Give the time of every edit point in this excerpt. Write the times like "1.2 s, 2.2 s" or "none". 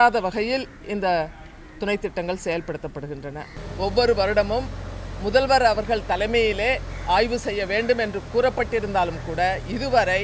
3.6 s

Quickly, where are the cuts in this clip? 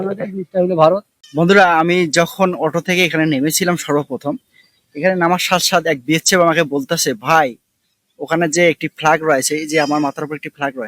1.2 s

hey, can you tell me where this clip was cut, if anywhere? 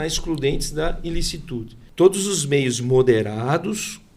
1.8 s

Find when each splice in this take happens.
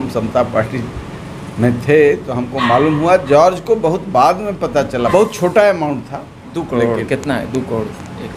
5.1 s

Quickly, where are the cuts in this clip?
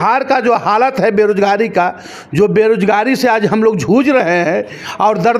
none

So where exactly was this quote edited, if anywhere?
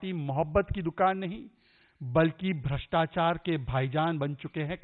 none

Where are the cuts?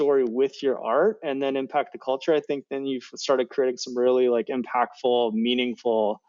none

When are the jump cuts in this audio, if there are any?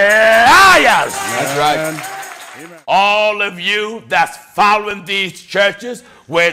2.5 s

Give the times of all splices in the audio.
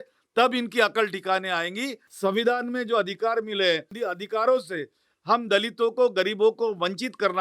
2.0 s, 3.9 s

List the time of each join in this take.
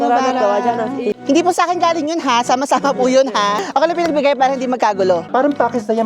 1.2 s, 3.6 s, 5.2 s

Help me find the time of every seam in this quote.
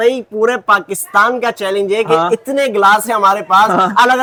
none

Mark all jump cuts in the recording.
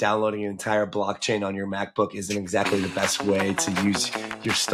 none

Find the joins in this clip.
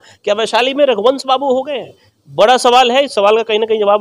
none

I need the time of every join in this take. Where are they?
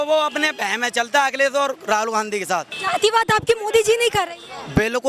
2.8 s

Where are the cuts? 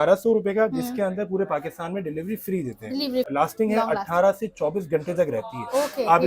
3.4 s

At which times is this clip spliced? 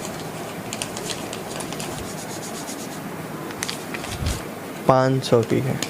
1.9 s, 4.3 s

